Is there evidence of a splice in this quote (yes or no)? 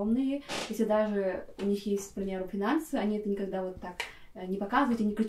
no